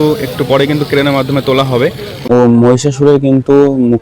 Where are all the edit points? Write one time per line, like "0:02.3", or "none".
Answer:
0:02.1